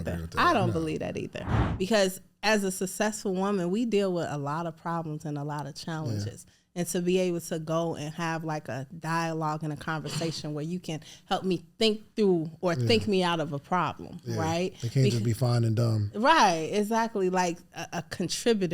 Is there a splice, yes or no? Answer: yes